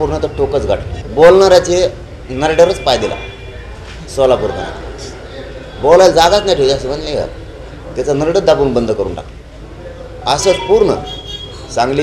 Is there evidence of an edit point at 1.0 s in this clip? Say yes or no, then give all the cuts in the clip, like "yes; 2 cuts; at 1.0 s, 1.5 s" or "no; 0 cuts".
yes; 1 cut; at 1.0 s